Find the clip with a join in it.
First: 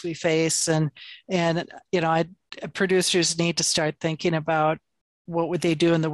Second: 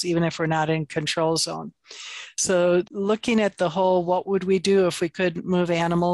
second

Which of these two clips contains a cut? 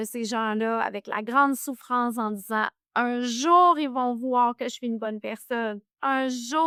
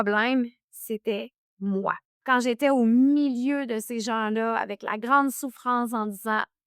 second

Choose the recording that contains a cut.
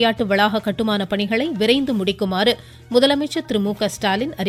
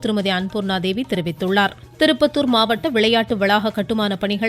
second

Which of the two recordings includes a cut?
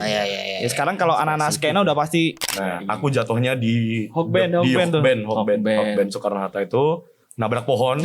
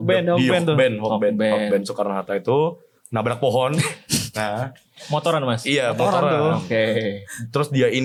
first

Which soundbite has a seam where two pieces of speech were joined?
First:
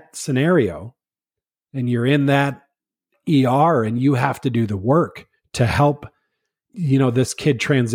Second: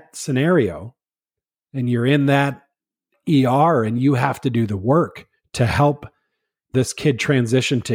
second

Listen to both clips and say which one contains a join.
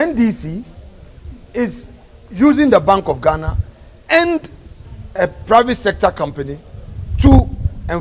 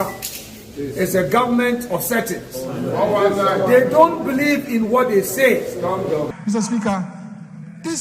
second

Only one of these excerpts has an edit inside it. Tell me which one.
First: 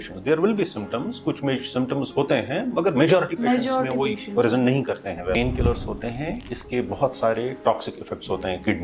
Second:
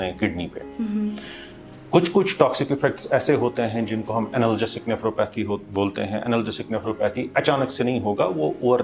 first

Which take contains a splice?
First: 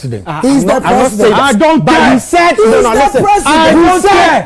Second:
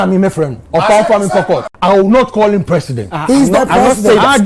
second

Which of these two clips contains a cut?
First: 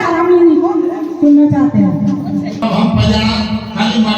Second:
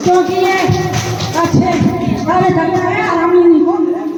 first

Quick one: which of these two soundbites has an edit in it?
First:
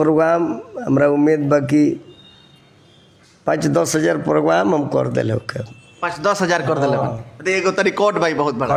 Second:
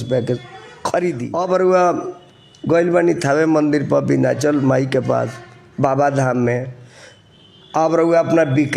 second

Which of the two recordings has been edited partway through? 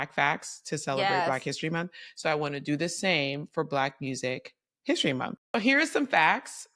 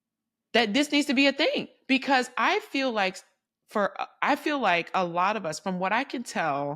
first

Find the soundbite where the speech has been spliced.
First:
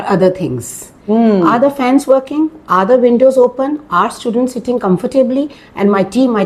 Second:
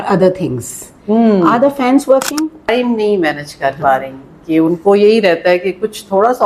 second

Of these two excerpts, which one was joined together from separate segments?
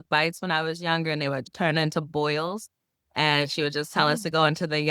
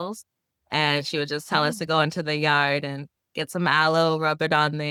first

